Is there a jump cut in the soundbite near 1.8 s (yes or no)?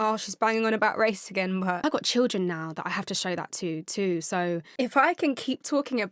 yes